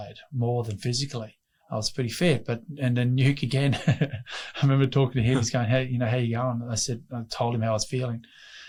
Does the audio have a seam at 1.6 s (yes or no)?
no